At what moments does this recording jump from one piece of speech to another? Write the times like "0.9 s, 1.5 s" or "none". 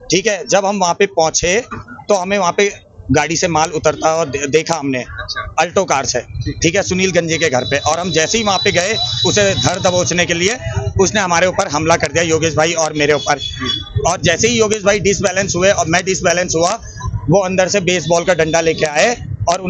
none